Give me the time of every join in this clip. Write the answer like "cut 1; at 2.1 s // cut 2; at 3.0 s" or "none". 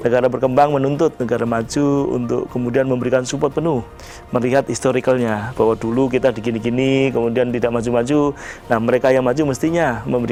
none